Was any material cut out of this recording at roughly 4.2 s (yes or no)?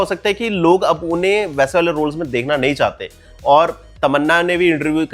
no